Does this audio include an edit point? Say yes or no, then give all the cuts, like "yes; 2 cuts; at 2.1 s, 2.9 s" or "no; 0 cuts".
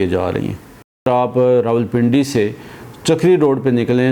yes; 1 cut; at 1.1 s